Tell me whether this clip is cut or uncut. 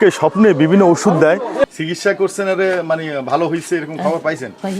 cut